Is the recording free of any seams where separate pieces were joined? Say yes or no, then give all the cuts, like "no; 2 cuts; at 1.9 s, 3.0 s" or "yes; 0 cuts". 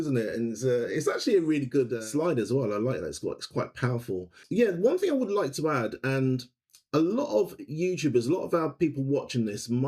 no; 2 cuts; at 2.0 s, 4.4 s